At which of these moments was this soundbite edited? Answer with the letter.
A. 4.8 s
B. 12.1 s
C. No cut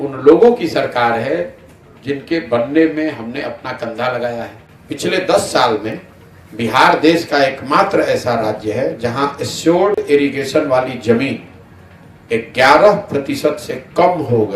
A